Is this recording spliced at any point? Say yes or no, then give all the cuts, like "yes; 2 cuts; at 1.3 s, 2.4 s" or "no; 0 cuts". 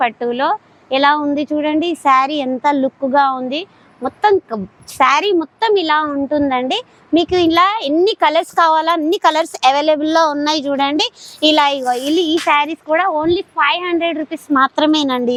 no; 0 cuts